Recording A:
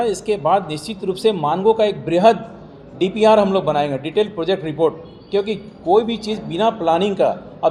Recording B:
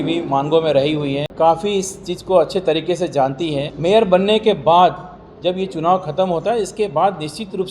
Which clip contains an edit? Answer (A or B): B